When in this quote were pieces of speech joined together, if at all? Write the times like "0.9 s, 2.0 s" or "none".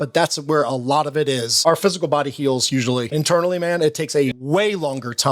1.5 s, 3.1 s, 4.4 s